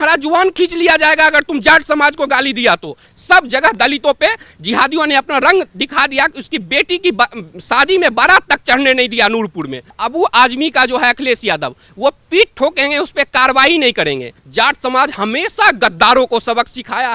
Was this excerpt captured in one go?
no; 3 cuts; at 3.1 s, 10.0 s, 14.4 s

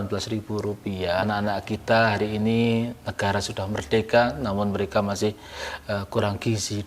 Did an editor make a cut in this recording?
yes; 1 cut; at 1.2 s

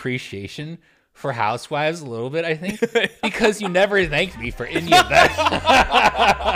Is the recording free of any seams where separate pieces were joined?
yes; 0 cuts

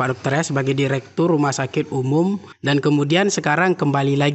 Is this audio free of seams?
yes; 0 cuts

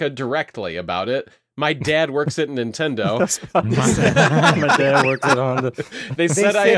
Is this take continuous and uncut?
yes; 0 cuts

